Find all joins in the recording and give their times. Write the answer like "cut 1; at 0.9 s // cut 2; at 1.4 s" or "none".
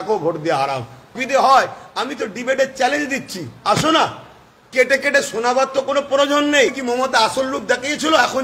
cut 1; at 1.2 s // cut 2; at 6.8 s